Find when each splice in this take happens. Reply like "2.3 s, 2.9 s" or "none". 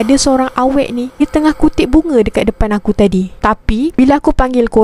1.2 s